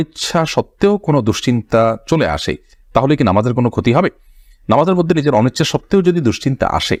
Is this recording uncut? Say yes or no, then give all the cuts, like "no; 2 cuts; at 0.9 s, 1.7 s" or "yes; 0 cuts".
yes; 0 cuts